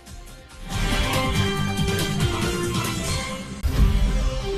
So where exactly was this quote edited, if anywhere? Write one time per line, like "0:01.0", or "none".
0:03.6